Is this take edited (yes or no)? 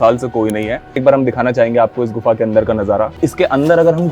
yes